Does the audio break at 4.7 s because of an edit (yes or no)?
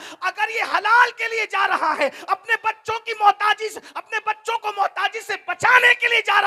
no